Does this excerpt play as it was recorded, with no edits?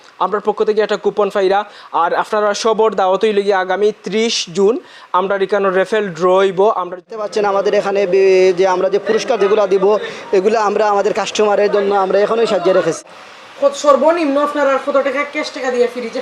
no; 2 cuts; at 7.1 s, 13.0 s

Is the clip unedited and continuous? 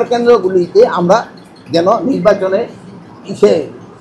yes; 0 cuts

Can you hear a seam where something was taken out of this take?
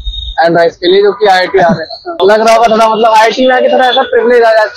yes; 1 cut; at 2.2 s

